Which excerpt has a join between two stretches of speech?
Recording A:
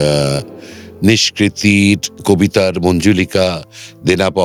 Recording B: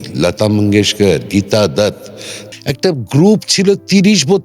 B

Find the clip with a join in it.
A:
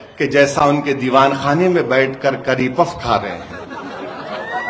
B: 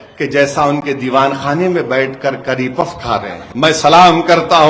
B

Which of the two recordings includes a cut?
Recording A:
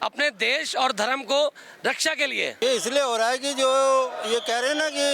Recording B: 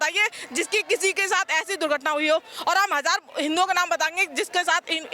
A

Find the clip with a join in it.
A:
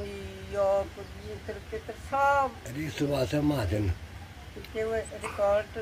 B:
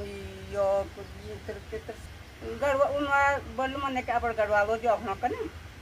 B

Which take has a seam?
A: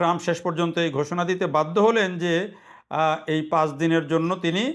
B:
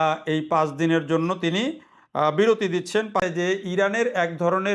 B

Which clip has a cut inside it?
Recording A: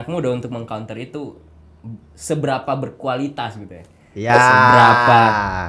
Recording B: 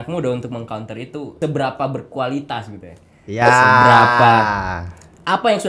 B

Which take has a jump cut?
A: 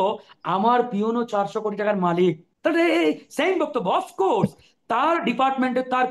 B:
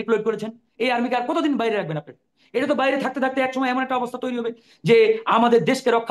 A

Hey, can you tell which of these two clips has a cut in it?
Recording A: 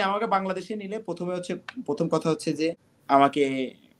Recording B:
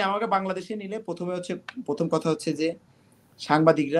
A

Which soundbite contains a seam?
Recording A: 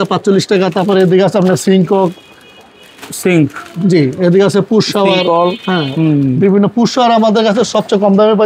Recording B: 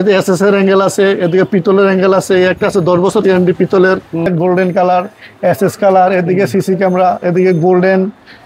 B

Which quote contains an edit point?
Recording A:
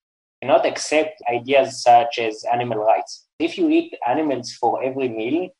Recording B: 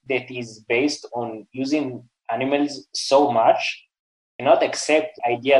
A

